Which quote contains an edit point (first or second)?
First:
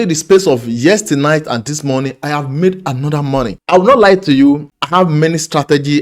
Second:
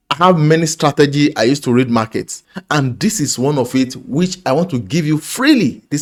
first